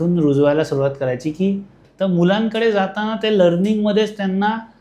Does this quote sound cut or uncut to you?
cut